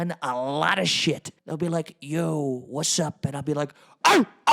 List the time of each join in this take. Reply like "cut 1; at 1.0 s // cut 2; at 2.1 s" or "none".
cut 1; at 1.4 s